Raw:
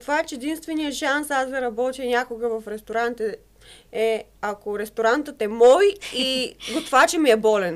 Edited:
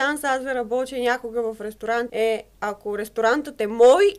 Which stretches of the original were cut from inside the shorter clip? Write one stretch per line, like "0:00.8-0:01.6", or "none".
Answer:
0:03.1-0:03.9